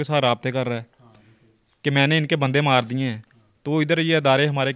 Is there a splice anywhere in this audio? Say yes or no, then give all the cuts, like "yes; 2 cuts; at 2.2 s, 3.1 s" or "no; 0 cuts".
no; 0 cuts